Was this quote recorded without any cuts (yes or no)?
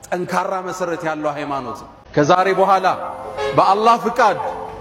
no